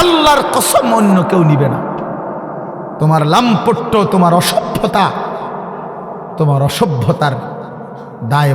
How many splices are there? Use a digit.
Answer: 1